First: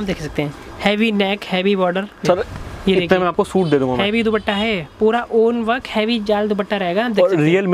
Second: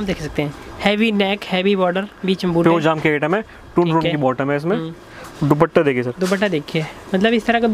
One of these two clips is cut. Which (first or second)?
first